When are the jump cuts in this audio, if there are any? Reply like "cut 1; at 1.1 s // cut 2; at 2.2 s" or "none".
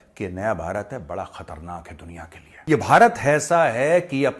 cut 1; at 2.4 s